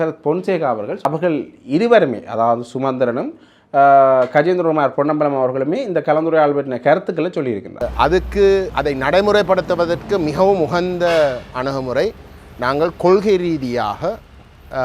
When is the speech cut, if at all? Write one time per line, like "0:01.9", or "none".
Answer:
0:01.0
0:07.8